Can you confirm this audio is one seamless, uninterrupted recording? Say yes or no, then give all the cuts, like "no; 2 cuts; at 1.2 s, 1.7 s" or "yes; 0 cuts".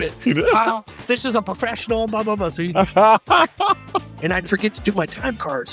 no; 1 cut; at 4.1 s